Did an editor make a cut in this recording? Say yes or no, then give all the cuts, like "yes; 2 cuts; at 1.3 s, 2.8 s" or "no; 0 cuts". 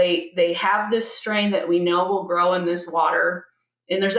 no; 0 cuts